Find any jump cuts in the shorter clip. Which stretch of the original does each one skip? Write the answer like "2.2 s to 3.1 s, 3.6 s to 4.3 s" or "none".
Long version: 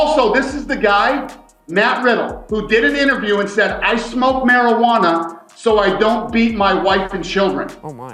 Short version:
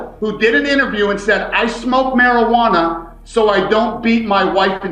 none